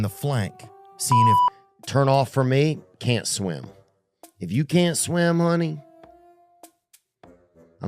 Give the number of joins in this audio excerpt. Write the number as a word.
one